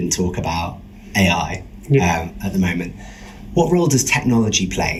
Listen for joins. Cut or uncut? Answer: uncut